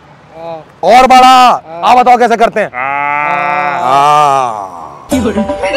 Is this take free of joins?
yes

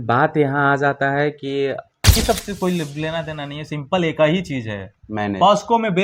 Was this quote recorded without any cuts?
no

